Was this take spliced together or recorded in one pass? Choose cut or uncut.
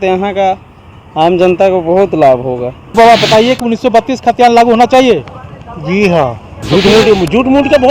cut